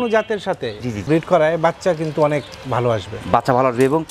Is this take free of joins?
no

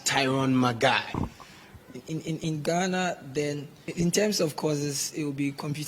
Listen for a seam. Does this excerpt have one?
yes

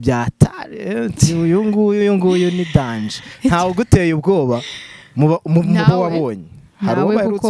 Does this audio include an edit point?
no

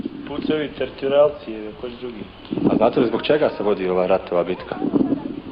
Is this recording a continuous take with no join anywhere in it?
yes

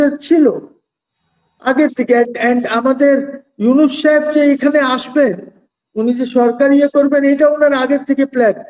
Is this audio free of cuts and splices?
yes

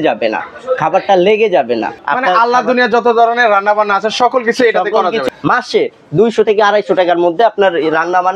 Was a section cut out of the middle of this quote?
yes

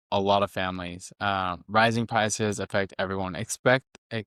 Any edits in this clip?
no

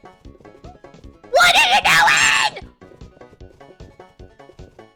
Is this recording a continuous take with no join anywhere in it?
yes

